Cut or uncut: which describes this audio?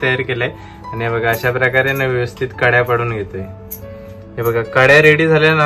uncut